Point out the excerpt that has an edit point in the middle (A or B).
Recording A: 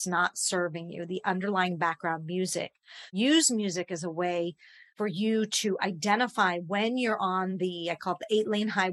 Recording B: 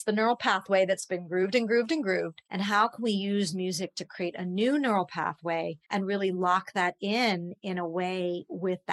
B